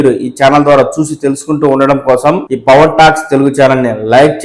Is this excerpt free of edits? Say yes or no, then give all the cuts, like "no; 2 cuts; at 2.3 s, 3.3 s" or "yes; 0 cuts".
no; 1 cut; at 2.5 s